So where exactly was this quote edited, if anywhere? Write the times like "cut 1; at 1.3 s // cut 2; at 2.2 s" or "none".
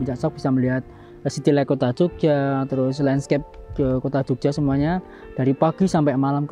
none